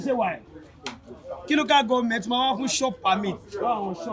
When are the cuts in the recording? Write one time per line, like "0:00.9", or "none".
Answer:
none